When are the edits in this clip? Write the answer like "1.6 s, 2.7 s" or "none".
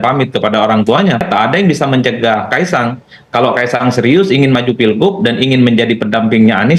1.2 s